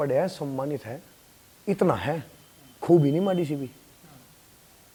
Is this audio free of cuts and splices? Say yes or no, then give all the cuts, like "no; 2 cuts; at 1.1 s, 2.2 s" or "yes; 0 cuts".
yes; 0 cuts